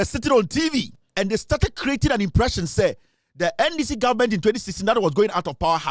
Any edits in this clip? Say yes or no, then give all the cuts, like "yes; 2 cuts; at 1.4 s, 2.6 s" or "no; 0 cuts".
yes; 1 cut; at 1.0 s